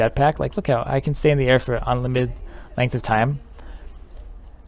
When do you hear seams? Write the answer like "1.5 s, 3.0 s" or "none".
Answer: none